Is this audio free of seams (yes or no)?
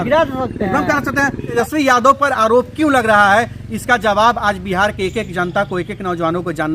no